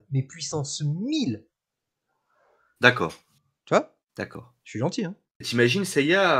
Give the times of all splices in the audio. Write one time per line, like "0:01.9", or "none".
0:05.5